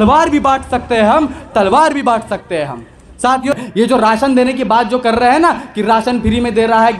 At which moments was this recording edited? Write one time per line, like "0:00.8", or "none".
0:03.5